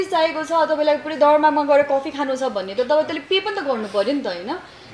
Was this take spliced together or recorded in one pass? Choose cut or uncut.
uncut